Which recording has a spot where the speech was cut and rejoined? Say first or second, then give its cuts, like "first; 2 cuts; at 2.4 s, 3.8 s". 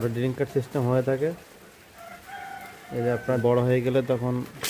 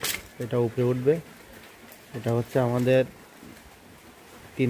first; 1 cut; at 3.4 s